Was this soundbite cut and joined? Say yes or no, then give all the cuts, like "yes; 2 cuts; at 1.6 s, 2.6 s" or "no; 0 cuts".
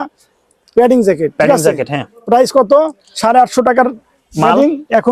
no; 0 cuts